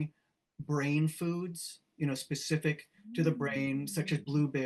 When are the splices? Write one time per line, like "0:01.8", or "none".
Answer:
none